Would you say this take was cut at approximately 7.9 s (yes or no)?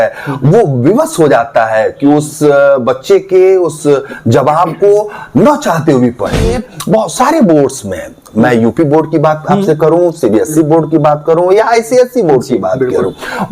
no